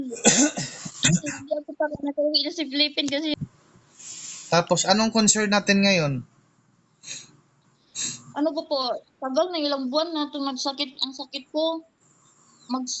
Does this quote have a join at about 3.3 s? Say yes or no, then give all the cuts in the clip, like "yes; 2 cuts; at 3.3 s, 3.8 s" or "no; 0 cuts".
yes; 1 cut; at 3.3 s